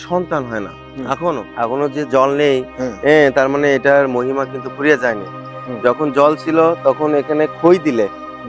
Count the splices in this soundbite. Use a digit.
1